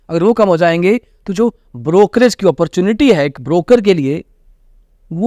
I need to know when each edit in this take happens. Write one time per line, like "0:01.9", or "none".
none